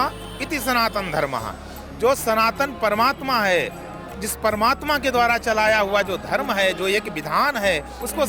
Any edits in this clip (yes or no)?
no